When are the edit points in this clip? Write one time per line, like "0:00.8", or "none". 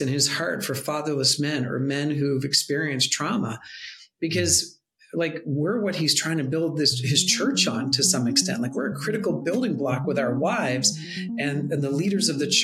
none